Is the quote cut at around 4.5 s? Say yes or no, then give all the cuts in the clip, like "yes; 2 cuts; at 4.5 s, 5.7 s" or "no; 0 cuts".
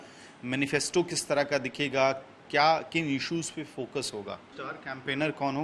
yes; 1 cut; at 4.5 s